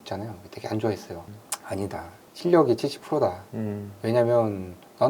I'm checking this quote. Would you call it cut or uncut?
cut